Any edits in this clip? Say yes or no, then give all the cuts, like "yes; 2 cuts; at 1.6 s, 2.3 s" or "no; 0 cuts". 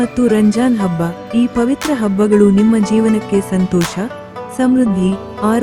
no; 0 cuts